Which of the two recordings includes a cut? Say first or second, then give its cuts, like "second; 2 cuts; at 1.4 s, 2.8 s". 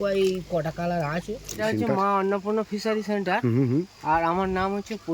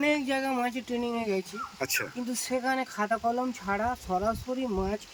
first; 1 cut; at 1.6 s